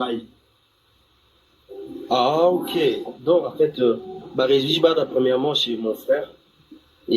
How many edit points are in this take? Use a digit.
1